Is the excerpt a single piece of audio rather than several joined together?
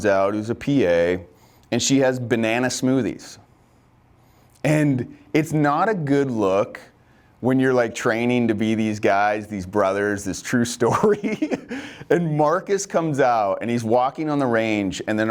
yes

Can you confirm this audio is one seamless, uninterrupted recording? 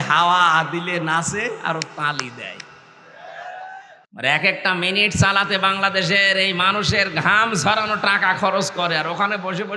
no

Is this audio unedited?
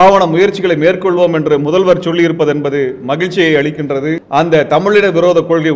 no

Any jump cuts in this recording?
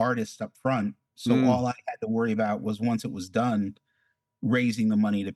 no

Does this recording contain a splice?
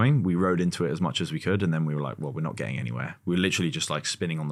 no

